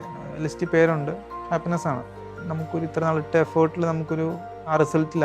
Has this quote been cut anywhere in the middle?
yes; 2 cuts; at 1.3 s, 2.3 s

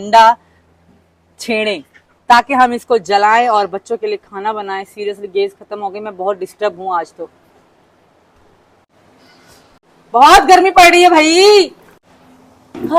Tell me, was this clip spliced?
no; 0 cuts

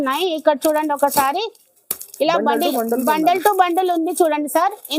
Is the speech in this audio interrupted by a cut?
no; 0 cuts

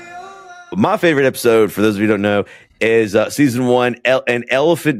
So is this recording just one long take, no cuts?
yes; 0 cuts

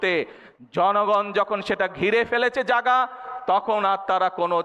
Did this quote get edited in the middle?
no; 0 cuts

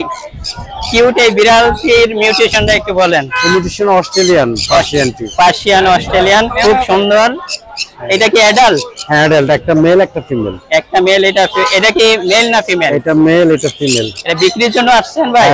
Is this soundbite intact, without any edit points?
yes; 0 cuts

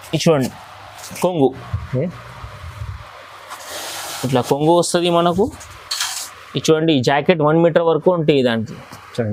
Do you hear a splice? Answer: no; 0 cuts

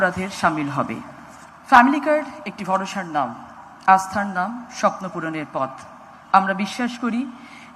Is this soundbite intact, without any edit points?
yes; 0 cuts

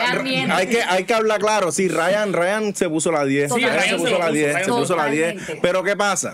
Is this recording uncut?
yes; 0 cuts

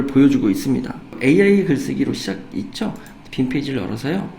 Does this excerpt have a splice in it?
yes; 1 cut; at 1.1 s

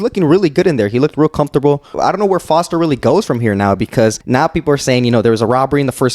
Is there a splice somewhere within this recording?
yes; 2 cuts; at 1.9 s, 4.2 s

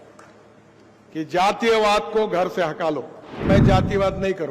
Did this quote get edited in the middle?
yes; 1 cut; at 3.4 s

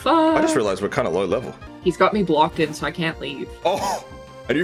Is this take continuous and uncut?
no; 1 cut; at 1.6 s

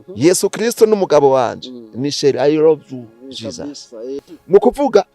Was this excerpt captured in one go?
no; 1 cut; at 4.2 s

